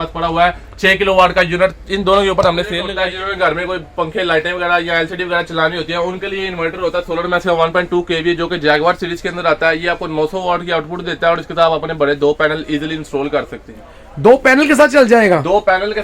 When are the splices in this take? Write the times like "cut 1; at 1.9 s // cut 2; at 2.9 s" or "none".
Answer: cut 1; at 3.0 s